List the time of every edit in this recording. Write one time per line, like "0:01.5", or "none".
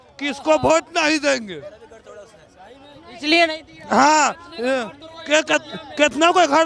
none